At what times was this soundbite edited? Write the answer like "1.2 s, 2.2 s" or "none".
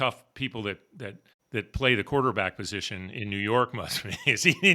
none